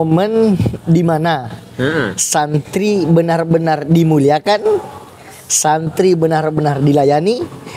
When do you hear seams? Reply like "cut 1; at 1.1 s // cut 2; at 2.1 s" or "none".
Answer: none